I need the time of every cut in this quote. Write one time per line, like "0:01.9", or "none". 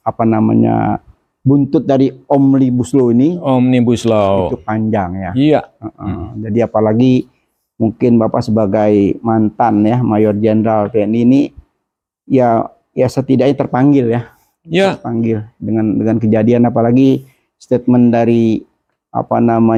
none